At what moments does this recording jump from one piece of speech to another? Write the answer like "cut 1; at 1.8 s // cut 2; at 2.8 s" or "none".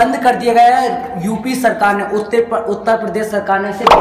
none